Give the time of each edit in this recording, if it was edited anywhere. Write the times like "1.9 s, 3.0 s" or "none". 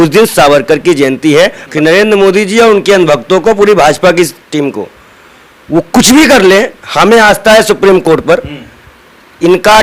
1.6 s